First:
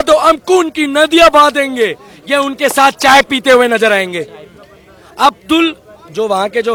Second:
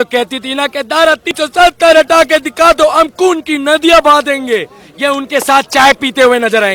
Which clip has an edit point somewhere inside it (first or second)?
second